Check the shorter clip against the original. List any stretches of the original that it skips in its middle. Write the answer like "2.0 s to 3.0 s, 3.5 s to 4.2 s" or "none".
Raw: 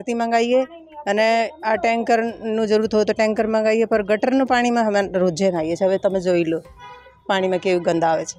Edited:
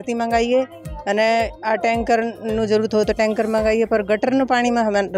none